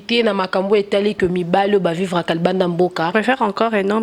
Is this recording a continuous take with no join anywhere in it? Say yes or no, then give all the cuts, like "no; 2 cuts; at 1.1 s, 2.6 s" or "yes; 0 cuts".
no; 1 cut; at 3.1 s